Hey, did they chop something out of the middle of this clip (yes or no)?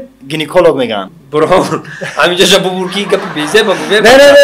yes